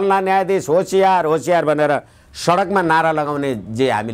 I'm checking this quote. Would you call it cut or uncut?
uncut